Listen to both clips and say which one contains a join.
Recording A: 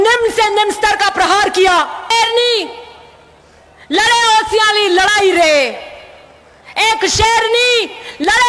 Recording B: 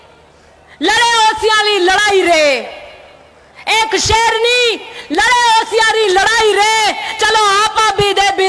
A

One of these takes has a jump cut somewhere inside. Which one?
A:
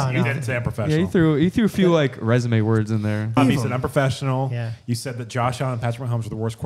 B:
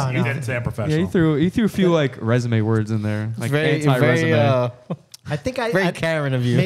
A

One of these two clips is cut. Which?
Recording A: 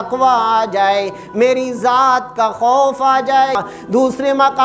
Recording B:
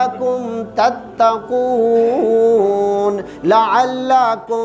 A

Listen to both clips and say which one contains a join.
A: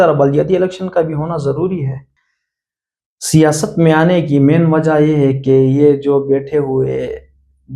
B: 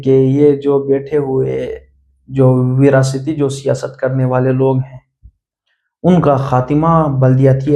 A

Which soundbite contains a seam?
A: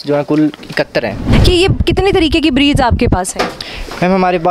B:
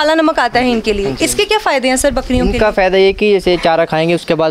A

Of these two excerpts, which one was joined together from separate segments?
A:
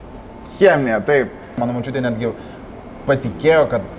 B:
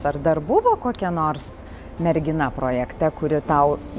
A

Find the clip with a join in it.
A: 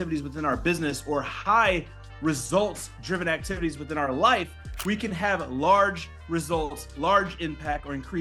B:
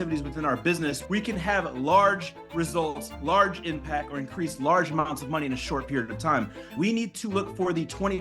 B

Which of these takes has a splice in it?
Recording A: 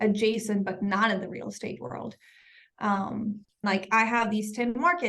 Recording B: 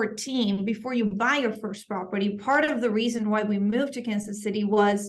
A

